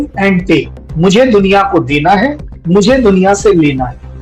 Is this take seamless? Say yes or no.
yes